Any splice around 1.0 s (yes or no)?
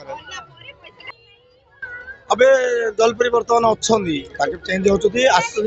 yes